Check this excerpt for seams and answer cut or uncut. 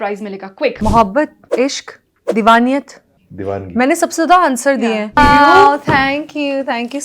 cut